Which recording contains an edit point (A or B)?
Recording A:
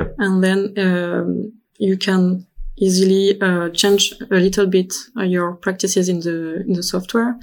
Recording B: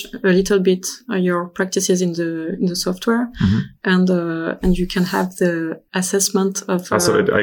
B